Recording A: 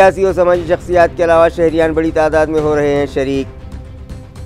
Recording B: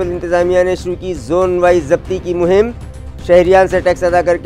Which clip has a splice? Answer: A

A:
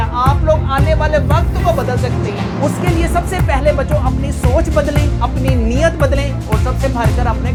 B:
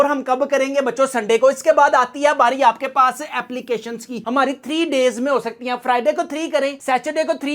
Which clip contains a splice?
B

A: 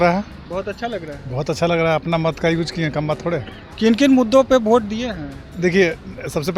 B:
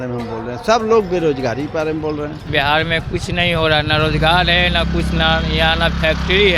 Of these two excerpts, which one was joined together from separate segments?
B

